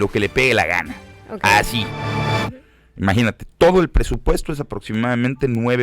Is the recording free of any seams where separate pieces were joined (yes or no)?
no